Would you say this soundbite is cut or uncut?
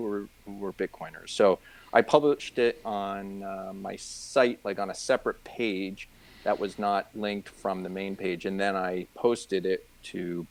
uncut